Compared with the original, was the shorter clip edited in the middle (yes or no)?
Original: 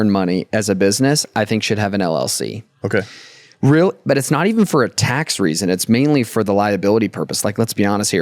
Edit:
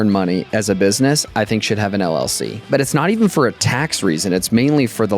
yes